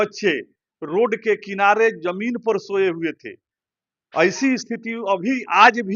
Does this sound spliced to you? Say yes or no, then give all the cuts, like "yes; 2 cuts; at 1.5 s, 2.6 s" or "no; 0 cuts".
no; 0 cuts